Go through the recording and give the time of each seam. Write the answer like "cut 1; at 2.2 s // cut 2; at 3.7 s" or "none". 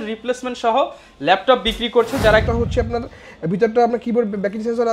cut 1; at 2.4 s